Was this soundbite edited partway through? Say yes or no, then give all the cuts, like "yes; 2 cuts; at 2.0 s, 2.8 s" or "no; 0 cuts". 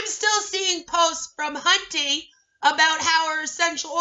no; 0 cuts